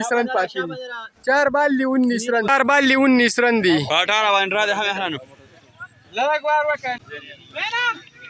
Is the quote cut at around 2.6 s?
yes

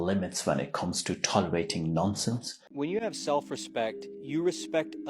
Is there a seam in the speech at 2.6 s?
yes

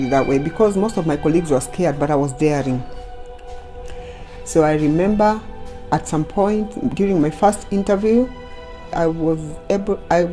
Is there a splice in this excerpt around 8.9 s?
yes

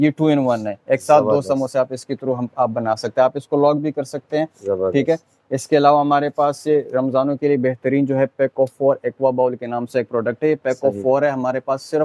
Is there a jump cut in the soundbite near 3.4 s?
no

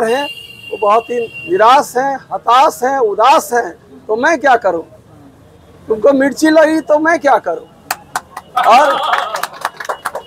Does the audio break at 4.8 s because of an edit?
no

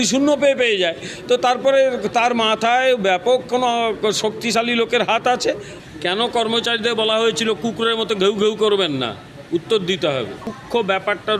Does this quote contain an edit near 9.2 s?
no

